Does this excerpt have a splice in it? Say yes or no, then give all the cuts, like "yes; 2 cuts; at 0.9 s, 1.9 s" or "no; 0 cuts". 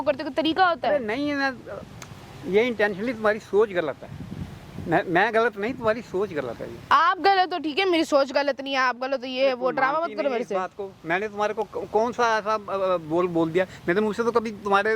no; 0 cuts